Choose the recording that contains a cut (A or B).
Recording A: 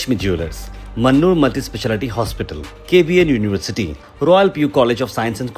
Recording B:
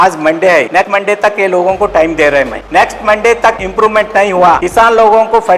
B